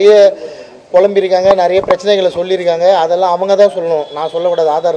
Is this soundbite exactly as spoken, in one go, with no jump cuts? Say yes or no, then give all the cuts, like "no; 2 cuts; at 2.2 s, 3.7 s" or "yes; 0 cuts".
yes; 0 cuts